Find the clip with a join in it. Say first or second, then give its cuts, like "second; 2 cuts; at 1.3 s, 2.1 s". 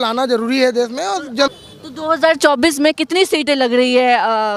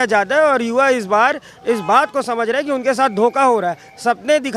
first; 1 cut; at 1.5 s